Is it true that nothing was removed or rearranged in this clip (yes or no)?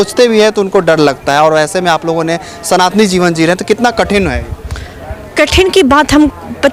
yes